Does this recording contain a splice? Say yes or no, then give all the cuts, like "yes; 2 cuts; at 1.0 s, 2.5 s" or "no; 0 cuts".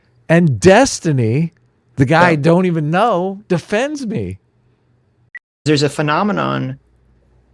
yes; 1 cut; at 5.6 s